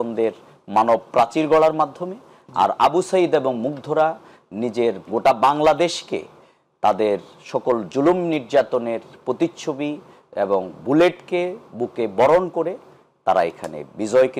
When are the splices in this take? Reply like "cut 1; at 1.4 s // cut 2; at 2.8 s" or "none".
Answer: none